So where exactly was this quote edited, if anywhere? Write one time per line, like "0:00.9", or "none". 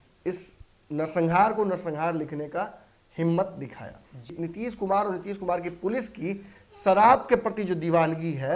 0:04.3